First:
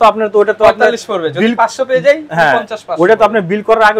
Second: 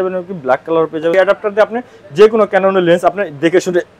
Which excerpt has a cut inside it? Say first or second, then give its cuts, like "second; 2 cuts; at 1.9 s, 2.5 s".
second; 1 cut; at 1.1 s